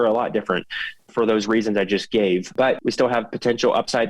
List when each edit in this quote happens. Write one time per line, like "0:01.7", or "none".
0:01.1
0:02.5